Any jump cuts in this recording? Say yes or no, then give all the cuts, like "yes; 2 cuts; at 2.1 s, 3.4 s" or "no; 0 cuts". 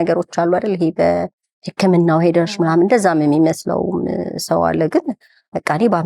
no; 0 cuts